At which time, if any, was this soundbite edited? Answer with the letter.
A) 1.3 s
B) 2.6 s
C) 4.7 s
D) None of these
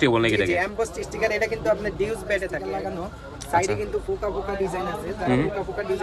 B